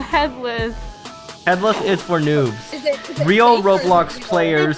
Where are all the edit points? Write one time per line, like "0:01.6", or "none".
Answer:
0:02.7